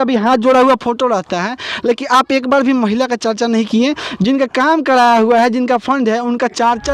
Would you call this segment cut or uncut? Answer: uncut